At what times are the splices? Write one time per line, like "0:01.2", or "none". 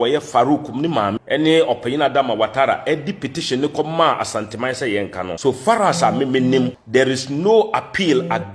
0:01.2
0:05.3
0:06.8